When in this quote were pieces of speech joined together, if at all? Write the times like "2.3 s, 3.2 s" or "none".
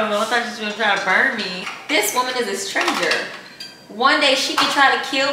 1.6 s